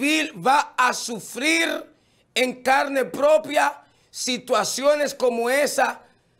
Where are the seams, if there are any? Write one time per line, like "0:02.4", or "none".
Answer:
none